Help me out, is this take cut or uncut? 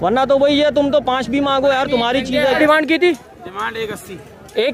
cut